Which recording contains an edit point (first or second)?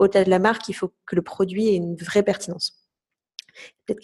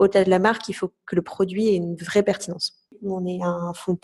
second